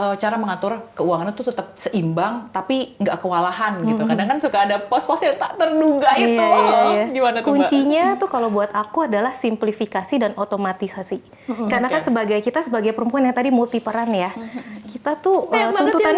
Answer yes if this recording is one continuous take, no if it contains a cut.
yes